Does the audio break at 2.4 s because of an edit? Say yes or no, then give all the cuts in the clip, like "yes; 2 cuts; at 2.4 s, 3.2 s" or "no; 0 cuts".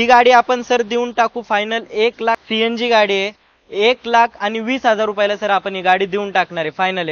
yes; 1 cut; at 2.4 s